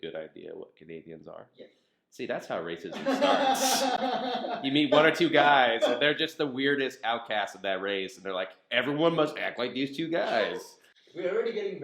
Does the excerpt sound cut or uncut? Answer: uncut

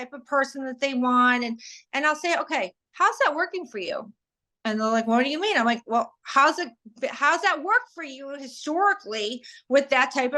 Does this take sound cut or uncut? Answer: uncut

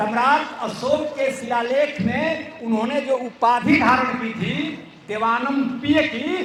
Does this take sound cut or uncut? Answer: uncut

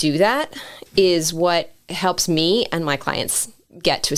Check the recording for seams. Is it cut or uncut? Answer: uncut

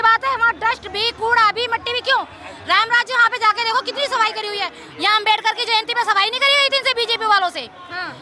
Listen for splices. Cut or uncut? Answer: uncut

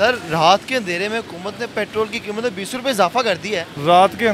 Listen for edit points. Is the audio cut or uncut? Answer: uncut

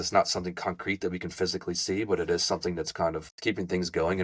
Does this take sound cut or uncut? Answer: cut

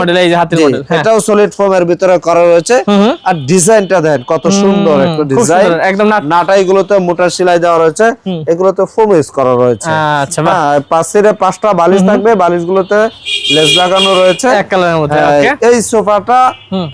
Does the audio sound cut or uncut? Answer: uncut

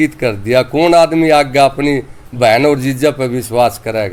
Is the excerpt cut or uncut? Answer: uncut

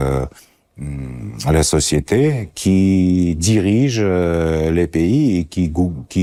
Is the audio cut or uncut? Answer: uncut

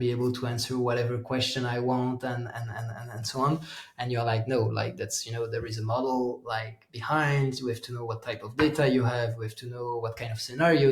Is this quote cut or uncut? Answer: uncut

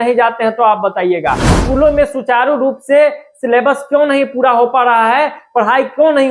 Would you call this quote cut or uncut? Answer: cut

